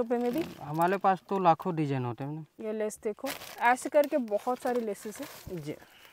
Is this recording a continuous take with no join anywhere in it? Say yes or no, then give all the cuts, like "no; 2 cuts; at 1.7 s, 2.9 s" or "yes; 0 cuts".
no; 1 cut; at 2.6 s